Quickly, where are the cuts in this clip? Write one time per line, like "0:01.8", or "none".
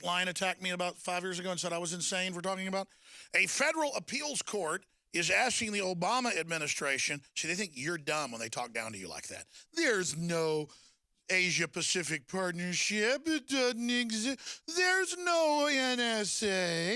0:07.0